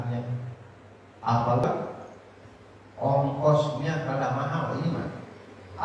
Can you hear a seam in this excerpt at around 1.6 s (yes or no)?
yes